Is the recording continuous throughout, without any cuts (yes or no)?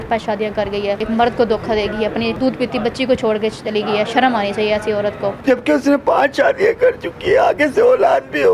no